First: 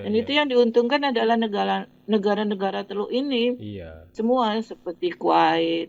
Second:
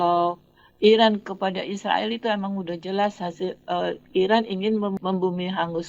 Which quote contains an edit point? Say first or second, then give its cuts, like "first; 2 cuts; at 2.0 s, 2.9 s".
second; 1 cut; at 5.0 s